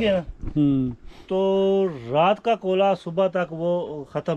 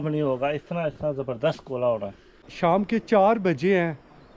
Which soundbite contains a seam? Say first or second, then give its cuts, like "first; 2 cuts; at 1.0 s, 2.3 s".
second; 1 cut; at 2.4 s